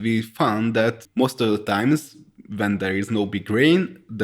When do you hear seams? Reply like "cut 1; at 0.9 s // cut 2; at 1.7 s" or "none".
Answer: cut 1; at 1.0 s